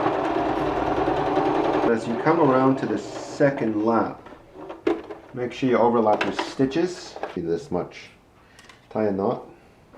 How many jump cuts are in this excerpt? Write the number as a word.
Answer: two